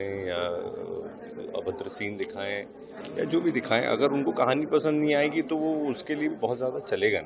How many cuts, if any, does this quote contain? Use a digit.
0